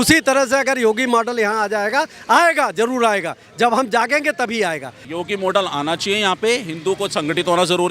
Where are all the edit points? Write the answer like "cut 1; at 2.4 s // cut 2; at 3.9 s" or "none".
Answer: cut 1; at 5.0 s